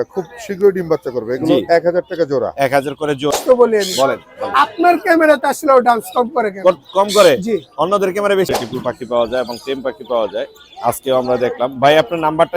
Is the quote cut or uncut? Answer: cut